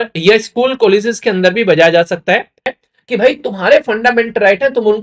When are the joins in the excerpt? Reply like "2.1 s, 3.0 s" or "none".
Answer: 2.8 s